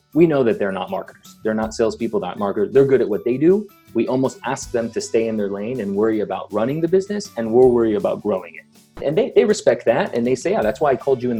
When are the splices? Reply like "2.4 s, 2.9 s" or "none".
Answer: 8.9 s